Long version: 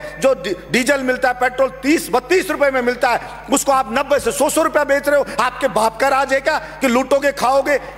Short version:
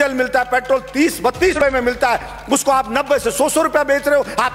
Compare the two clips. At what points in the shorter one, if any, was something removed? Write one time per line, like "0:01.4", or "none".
0:01.6